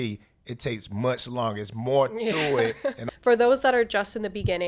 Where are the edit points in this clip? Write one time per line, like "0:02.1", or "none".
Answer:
0:03.0